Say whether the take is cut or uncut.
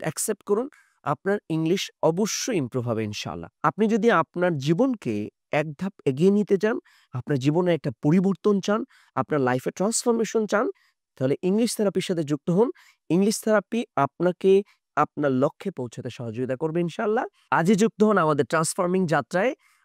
uncut